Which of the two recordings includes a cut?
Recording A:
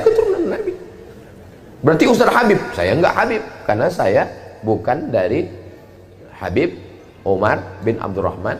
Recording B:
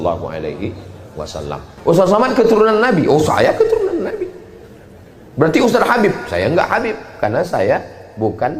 B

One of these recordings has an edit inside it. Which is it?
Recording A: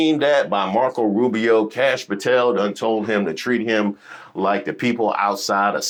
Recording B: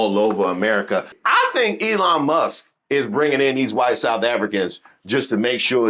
B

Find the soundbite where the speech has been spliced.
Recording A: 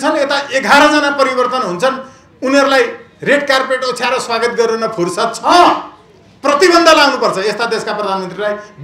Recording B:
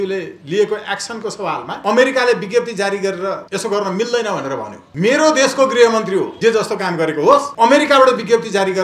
B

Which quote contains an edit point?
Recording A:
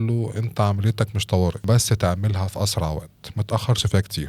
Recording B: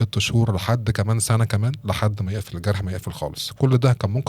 A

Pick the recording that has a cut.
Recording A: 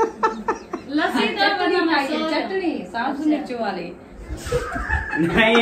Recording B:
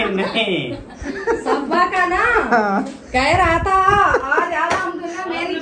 A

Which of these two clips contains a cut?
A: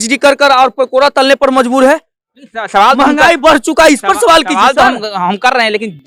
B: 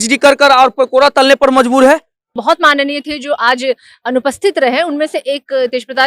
B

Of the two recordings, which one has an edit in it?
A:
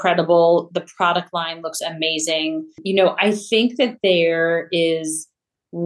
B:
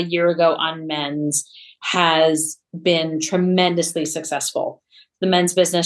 A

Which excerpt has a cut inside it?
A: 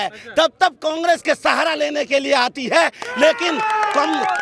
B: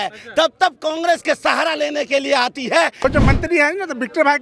B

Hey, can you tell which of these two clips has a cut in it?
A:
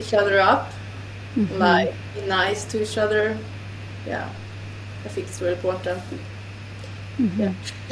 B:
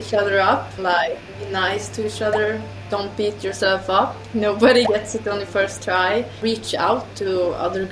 B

